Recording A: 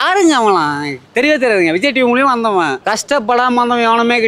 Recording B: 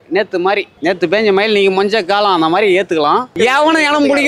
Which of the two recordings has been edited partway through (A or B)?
B